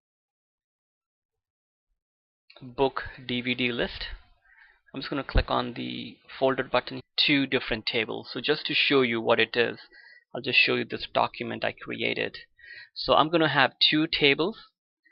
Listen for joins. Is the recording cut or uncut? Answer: uncut